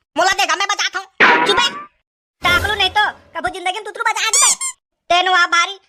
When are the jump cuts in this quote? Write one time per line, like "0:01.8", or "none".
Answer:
none